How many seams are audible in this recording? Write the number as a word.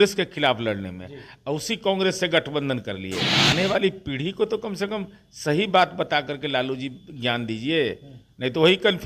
one